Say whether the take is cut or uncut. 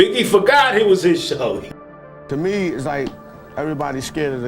cut